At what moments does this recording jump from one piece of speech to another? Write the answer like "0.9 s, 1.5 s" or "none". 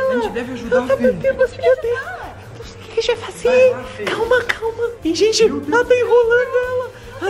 5.1 s